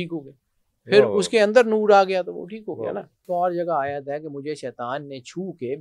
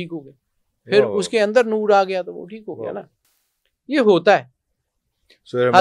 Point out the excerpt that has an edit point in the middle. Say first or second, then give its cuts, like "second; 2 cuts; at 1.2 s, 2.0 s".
first; 1 cut; at 3.3 s